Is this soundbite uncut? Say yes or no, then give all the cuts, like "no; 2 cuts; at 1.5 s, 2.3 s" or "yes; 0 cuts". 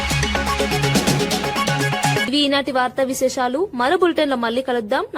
yes; 0 cuts